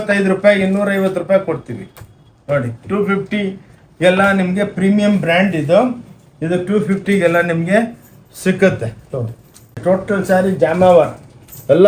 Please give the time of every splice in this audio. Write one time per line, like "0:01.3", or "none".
0:09.8